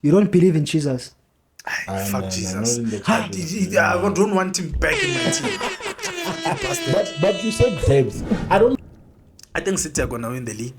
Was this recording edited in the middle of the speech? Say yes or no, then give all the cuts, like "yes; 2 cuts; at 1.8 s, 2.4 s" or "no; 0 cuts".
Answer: yes; 1 cut; at 8.8 s